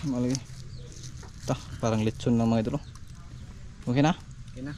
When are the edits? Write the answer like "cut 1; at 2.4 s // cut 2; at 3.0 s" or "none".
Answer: none

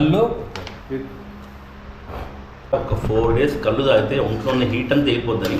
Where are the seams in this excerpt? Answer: cut 1; at 2.7 s

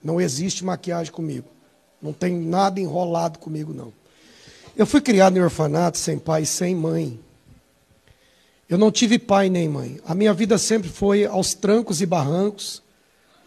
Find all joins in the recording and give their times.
none

